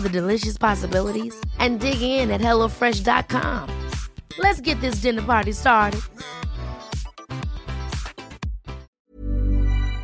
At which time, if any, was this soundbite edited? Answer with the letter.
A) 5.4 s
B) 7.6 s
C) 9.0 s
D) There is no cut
C